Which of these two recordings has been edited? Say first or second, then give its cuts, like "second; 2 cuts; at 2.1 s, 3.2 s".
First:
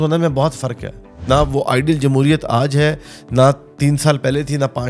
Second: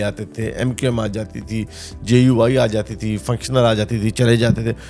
first; 1 cut; at 1.1 s